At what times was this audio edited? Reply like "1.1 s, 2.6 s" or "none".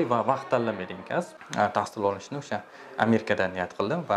1.4 s